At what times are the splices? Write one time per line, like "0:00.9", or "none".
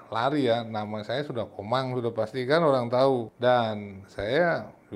0:03.3